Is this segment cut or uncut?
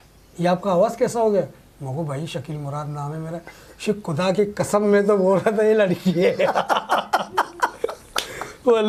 uncut